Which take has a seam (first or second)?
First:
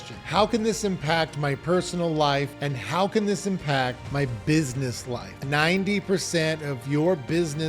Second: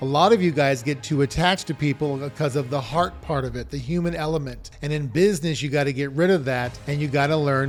first